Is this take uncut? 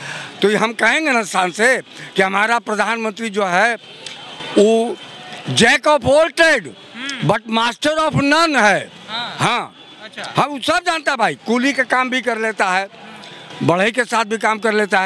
yes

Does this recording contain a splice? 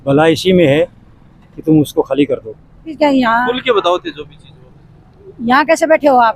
yes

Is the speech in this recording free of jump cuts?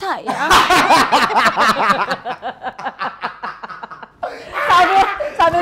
yes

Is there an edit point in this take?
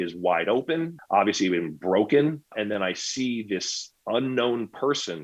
yes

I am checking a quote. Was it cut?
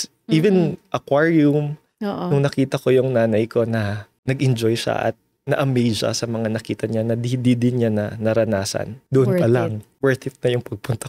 yes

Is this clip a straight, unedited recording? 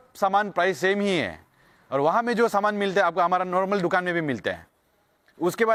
yes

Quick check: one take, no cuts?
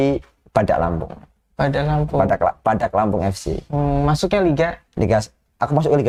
yes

